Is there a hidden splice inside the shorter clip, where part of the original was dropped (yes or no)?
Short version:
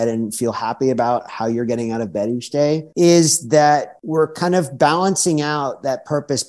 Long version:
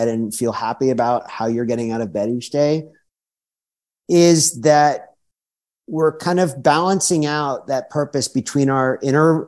yes